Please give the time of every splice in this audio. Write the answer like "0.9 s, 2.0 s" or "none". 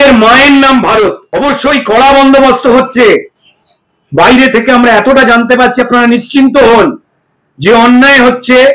1.3 s